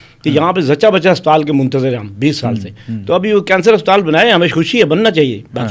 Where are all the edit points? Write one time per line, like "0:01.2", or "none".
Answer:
none